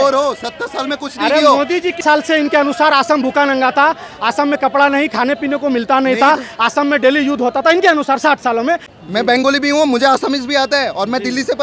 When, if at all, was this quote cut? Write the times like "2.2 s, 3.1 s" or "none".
2.0 s, 8.9 s